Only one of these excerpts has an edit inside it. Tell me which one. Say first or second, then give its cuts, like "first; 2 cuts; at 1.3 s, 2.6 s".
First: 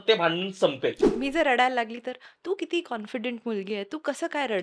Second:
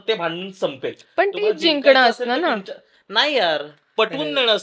first; 1 cut; at 1.0 s